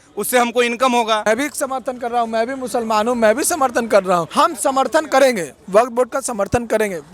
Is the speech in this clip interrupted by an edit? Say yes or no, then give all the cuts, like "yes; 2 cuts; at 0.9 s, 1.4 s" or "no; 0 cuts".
yes; 2 cuts; at 1.3 s, 4.3 s